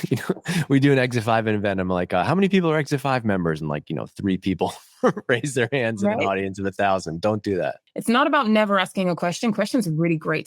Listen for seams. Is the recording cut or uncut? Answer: cut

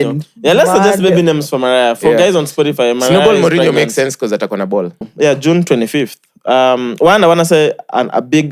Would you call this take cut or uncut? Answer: cut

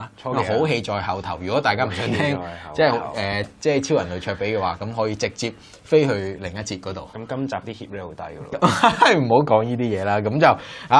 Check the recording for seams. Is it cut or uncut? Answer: cut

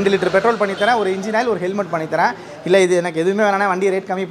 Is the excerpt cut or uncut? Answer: uncut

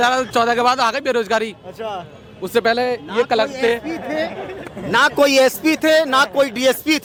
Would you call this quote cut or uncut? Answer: uncut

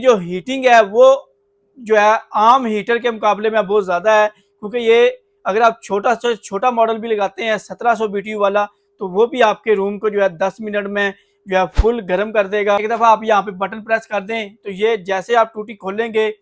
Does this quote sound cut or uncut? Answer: cut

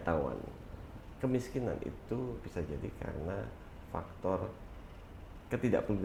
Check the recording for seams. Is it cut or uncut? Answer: uncut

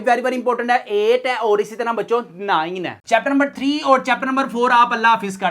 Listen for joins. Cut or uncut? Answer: cut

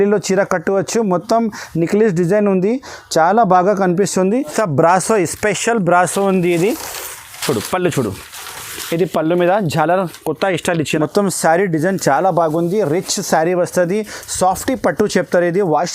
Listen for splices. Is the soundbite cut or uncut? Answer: cut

